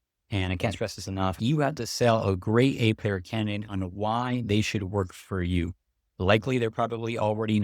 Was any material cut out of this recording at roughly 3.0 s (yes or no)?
no